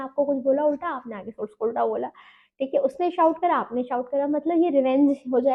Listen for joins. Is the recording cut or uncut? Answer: uncut